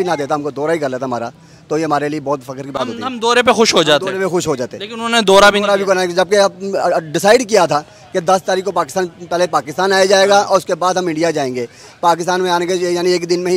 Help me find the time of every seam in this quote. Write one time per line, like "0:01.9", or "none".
none